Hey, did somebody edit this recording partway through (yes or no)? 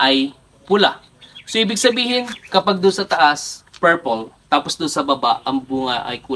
no